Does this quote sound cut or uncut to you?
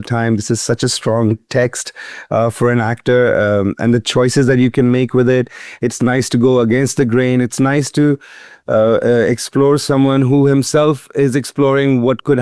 uncut